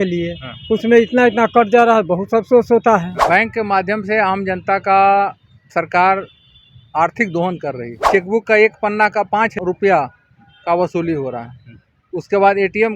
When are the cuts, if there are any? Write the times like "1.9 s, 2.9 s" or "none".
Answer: 3.1 s, 7.9 s, 9.5 s